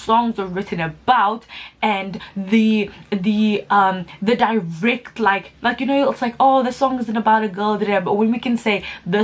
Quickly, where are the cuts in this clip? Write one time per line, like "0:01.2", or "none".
none